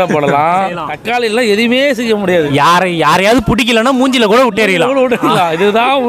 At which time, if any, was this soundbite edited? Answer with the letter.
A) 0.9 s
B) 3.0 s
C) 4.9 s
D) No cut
A